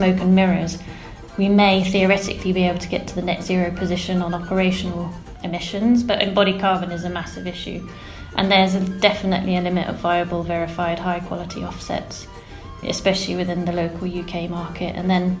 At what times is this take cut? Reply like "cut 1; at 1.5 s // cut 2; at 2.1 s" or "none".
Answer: cut 1; at 1.1 s